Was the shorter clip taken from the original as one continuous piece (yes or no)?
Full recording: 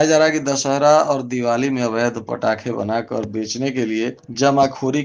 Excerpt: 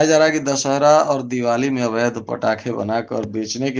yes